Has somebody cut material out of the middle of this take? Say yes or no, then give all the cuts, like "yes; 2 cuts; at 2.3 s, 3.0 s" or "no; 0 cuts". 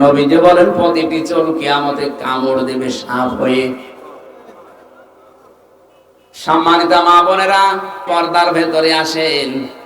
yes; 1 cut; at 8.0 s